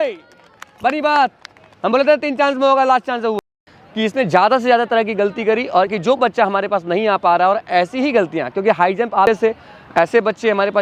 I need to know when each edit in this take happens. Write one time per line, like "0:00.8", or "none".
0:03.4
0:05.9
0:09.3